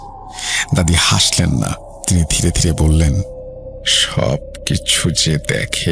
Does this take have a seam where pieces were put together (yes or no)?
no